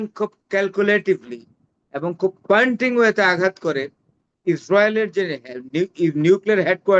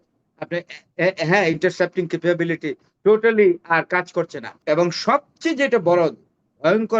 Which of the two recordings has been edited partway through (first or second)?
second